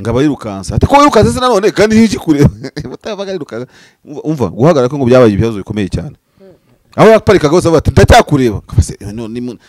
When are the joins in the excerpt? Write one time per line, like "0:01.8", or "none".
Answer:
none